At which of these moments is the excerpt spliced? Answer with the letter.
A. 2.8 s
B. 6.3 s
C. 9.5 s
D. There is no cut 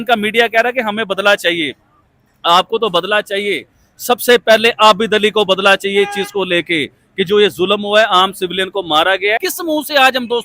C